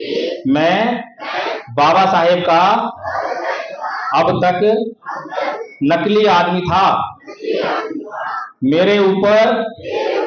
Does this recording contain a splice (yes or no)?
no